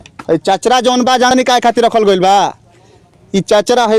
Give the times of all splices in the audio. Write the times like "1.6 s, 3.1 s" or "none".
1.3 s

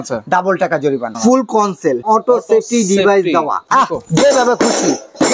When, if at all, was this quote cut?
1.1 s, 2.0 s, 3.6 s

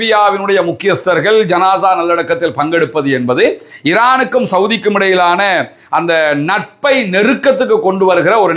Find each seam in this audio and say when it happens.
none

